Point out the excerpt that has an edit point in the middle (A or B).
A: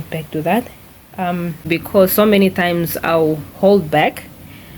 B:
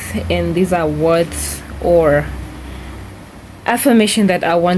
A